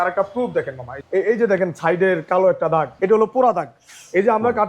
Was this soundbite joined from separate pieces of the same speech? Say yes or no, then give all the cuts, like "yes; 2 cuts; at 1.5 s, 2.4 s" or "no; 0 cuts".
yes; 2 cuts; at 0.9 s, 2.9 s